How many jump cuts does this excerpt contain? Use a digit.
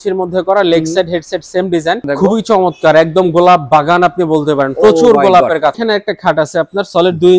2